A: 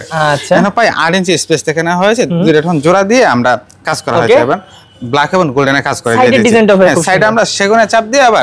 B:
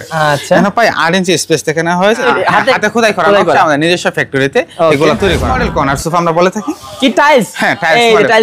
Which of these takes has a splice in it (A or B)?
B